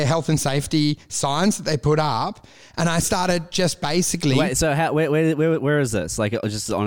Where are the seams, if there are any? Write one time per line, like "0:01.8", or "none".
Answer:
none